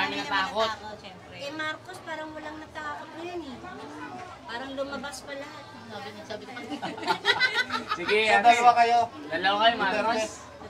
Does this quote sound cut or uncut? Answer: uncut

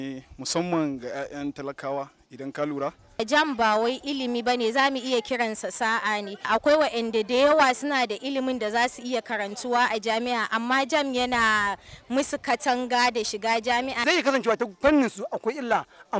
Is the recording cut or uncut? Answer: cut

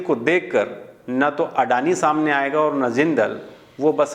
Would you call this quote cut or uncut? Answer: uncut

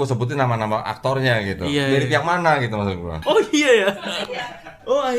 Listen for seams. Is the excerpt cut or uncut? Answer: cut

